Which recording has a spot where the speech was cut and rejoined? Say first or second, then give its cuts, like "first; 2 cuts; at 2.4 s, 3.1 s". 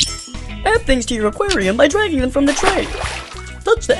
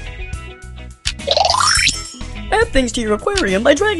second; 1 cut; at 0.9 s